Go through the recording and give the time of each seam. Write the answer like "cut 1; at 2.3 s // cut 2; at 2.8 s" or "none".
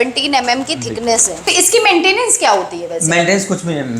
cut 1; at 1.4 s